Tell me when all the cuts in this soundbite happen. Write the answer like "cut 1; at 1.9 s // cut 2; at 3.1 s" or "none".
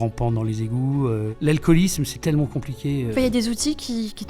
cut 1; at 1.3 s // cut 2; at 3.1 s